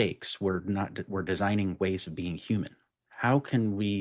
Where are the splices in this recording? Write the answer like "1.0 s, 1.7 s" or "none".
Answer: 3.0 s